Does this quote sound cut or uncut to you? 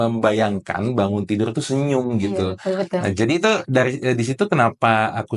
uncut